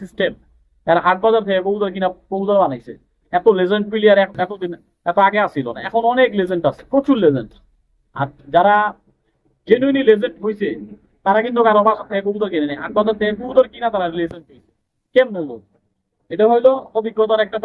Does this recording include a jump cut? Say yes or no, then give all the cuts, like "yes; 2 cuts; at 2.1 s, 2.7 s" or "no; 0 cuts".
no; 0 cuts